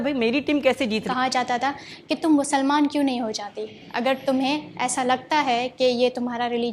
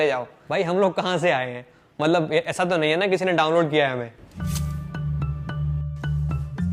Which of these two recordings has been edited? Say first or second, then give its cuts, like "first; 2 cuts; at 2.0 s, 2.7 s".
first; 1 cut; at 1.1 s